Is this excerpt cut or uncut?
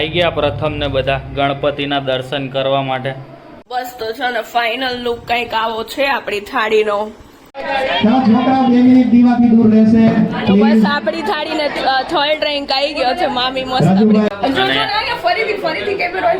cut